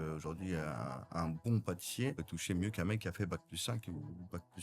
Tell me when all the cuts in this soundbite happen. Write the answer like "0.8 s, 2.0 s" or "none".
2.2 s